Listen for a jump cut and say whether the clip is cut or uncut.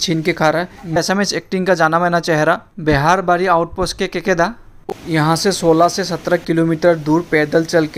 cut